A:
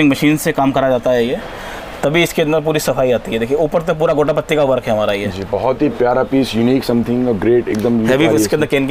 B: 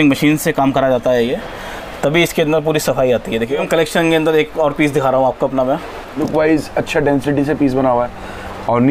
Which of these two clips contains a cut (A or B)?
B